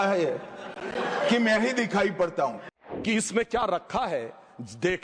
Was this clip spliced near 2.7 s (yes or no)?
yes